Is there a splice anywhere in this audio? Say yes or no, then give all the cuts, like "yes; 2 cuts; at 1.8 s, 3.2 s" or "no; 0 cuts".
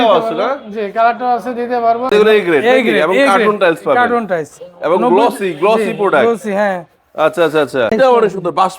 yes; 2 cuts; at 2.1 s, 7.9 s